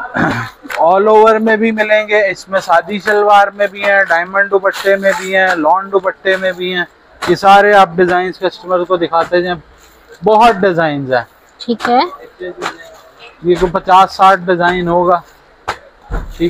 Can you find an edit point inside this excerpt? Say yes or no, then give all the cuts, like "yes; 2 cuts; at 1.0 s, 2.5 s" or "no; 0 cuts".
no; 0 cuts